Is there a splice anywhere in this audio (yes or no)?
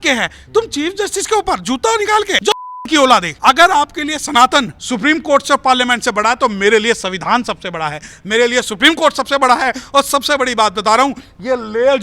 yes